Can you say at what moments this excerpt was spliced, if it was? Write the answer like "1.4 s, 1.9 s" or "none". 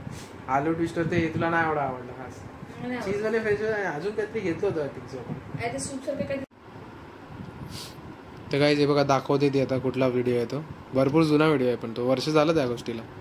6.4 s